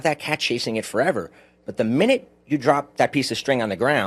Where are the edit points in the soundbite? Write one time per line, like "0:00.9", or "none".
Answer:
none